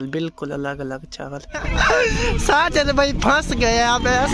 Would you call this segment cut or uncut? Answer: cut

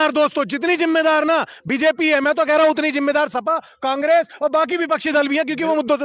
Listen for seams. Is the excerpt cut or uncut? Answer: uncut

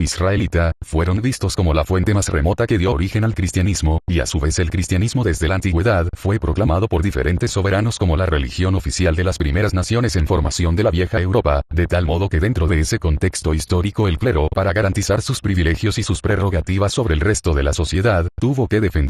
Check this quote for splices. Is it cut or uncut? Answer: cut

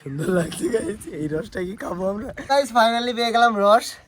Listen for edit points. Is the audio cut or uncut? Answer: cut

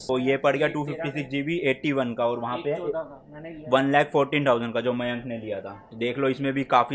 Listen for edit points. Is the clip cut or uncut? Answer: uncut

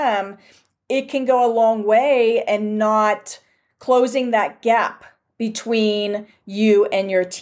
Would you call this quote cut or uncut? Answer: uncut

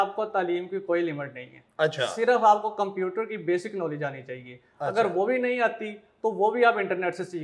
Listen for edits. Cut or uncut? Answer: uncut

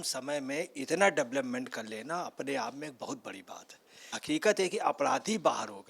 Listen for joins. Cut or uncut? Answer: cut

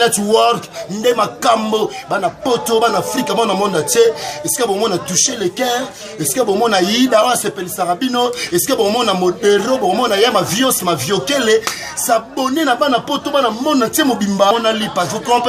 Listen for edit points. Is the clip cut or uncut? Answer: cut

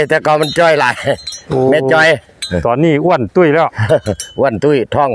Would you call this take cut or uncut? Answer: uncut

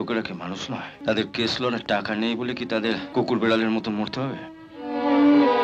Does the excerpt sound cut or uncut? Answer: cut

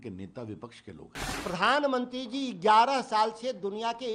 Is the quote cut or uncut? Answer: cut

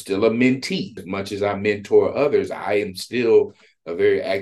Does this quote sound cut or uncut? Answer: cut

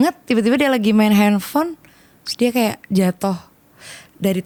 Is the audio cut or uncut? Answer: uncut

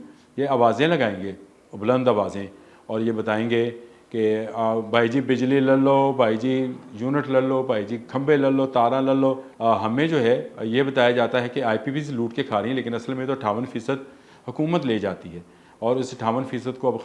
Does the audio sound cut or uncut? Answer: cut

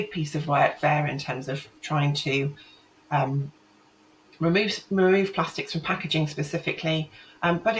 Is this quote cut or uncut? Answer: uncut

